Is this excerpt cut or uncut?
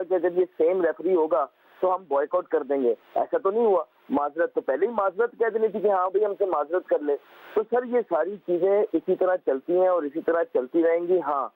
uncut